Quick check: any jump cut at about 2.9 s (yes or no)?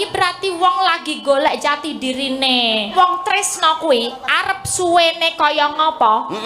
yes